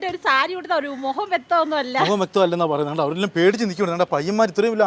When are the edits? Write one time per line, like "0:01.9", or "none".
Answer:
none